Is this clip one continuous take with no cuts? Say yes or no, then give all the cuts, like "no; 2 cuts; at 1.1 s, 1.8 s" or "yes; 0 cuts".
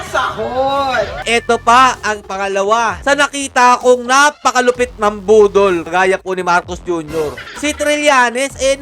no; 2 cuts; at 1.2 s, 7.5 s